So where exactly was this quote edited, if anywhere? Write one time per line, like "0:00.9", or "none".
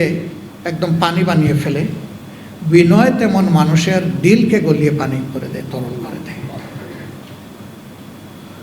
none